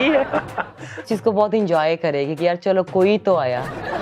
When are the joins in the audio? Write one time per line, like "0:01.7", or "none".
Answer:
0:01.0

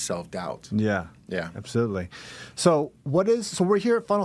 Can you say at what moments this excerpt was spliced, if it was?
none

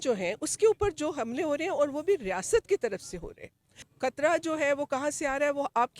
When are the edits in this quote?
0:03.9

